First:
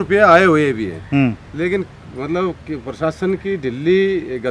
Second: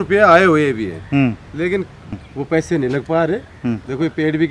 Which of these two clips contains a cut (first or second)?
second